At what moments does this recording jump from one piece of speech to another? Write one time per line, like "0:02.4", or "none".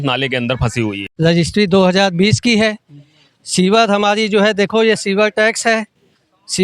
0:01.0